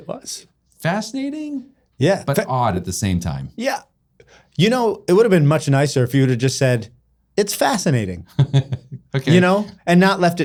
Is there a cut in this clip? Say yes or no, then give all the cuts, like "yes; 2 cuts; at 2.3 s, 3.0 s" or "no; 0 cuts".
no; 0 cuts